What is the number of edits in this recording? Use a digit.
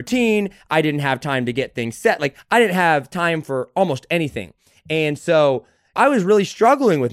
1